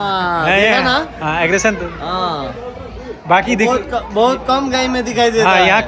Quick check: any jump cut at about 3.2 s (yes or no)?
no